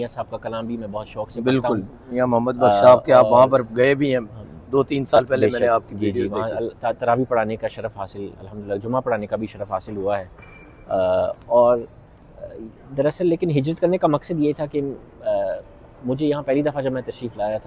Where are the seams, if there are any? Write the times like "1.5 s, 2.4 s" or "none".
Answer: none